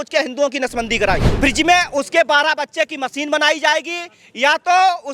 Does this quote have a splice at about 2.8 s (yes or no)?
no